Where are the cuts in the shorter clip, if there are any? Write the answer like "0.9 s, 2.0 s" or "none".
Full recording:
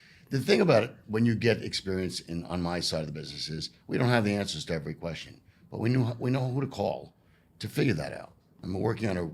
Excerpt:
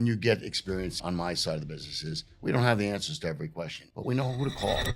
1.0 s, 4.0 s